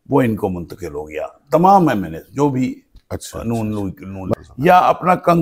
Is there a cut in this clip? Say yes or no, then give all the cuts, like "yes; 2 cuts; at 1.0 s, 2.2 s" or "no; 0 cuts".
yes; 1 cut; at 4.3 s